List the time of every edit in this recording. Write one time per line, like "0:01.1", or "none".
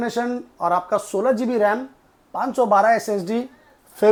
none